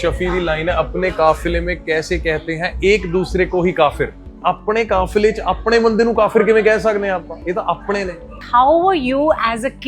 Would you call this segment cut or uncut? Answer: uncut